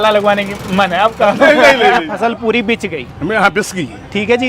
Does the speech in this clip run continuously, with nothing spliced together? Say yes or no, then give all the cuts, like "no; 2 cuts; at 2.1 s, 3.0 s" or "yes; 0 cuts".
no; 1 cut; at 2.1 s